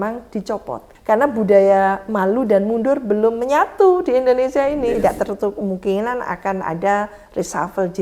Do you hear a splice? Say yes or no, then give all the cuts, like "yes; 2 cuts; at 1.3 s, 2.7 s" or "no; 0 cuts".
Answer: yes; 2 cuts; at 0.9 s, 4.8 s